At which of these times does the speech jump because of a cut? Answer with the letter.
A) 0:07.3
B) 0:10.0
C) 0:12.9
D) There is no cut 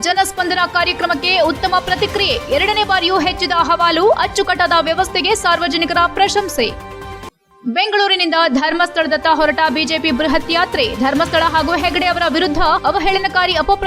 D